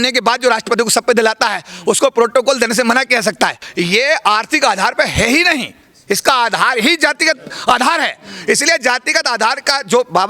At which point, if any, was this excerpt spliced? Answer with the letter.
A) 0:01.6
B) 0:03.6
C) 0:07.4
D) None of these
B